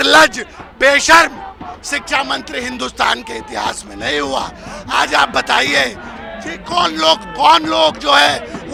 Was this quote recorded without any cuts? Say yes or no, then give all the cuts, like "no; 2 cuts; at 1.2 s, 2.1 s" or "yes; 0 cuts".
yes; 0 cuts